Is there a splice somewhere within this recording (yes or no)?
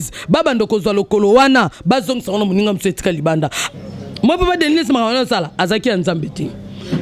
yes